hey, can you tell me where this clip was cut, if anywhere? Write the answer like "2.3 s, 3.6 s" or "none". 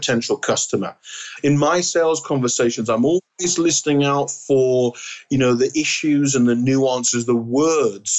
1.2 s